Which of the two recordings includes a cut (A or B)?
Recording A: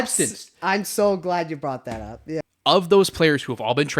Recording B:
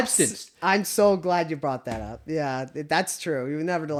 A